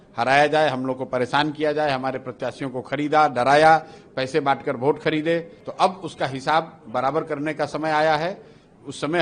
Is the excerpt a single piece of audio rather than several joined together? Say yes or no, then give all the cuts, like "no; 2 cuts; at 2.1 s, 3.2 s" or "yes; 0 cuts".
no; 1 cut; at 5.6 s